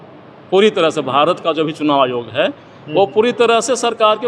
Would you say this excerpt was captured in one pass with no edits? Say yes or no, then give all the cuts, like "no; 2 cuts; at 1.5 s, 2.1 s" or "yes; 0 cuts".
yes; 0 cuts